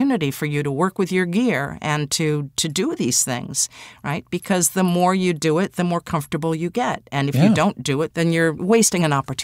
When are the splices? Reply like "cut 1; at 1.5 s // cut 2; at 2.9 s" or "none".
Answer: cut 1; at 8.2 s